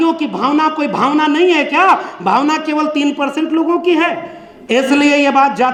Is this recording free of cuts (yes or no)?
yes